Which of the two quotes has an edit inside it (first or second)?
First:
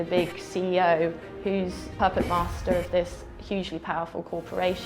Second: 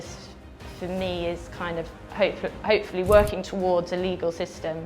first